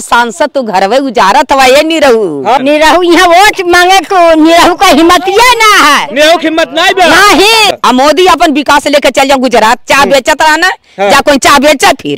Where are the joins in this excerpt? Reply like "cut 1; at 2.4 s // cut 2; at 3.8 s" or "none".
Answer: cut 1; at 2.6 s // cut 2; at 7.7 s